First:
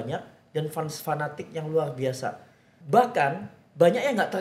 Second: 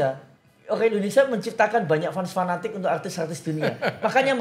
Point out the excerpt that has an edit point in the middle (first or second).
first